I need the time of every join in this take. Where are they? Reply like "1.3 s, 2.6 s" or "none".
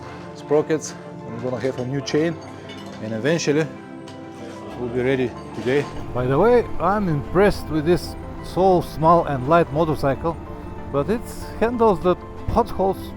6.0 s

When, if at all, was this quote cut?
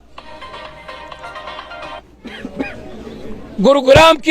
2.3 s

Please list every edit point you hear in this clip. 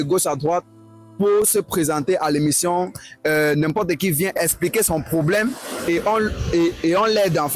4.4 s

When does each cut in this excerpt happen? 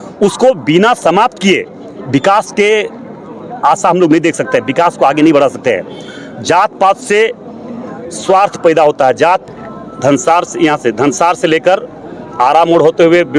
9.4 s

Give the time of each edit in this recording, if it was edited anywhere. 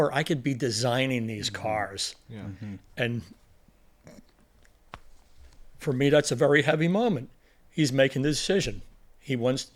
none

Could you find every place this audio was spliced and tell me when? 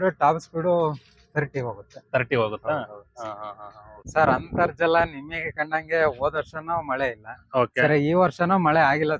3.7 s

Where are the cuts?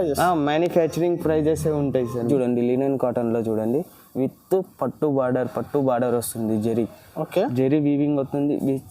2.3 s

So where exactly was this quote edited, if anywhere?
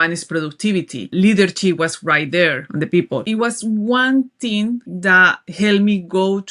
1.1 s, 3.0 s, 4.9 s

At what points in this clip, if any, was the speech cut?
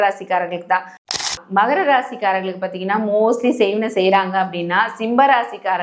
1.1 s

